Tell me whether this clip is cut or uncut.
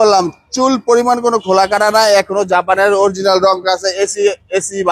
uncut